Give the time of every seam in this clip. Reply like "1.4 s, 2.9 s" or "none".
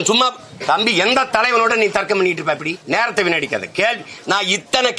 2.8 s